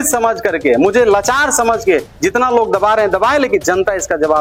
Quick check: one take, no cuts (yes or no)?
yes